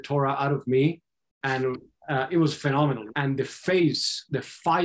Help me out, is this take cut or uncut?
cut